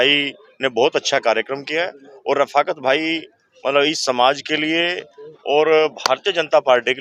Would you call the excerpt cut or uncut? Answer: uncut